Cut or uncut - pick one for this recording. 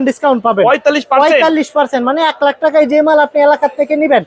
uncut